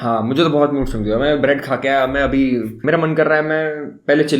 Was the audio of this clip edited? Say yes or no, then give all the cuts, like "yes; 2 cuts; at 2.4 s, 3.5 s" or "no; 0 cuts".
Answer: yes; 1 cut; at 2.7 s